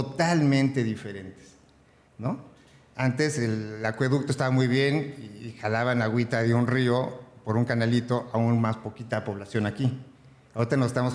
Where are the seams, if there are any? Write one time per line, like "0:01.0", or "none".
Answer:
none